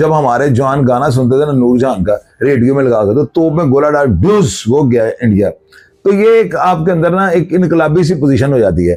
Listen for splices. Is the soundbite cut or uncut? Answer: uncut